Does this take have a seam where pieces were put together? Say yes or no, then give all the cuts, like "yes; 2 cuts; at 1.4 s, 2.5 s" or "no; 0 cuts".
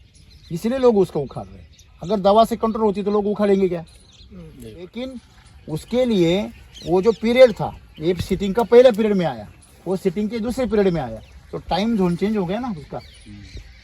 yes; 1 cut; at 4.9 s